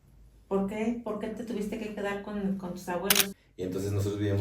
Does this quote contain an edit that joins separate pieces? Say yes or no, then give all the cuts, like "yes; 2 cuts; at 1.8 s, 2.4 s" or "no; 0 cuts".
yes; 1 cut; at 3.4 s